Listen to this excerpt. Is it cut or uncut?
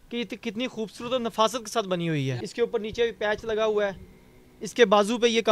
cut